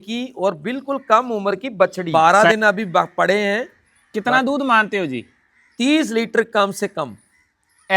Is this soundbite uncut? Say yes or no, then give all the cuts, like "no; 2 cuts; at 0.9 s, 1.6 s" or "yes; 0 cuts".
no; 1 cut; at 2.0 s